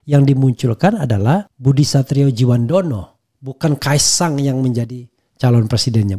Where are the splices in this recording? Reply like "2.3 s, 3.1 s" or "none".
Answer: 1.5 s